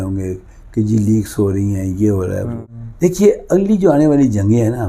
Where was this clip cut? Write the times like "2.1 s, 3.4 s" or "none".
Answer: 2.6 s